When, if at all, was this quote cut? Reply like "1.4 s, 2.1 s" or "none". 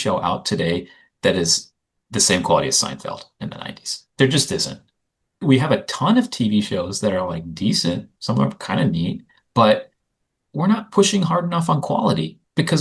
none